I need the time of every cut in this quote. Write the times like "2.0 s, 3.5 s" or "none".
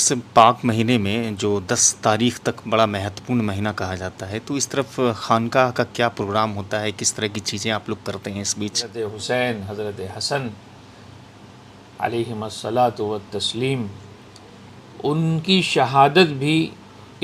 8.9 s